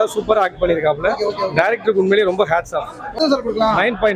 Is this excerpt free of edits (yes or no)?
no